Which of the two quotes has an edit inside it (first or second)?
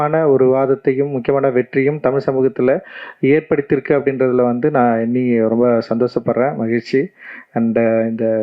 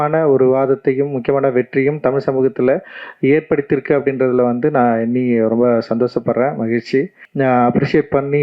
second